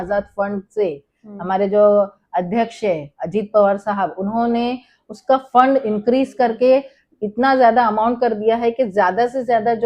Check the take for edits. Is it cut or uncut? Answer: uncut